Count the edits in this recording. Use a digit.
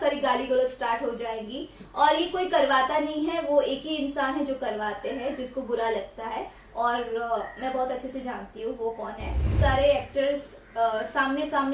1